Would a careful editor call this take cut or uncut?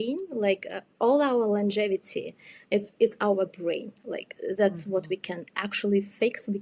uncut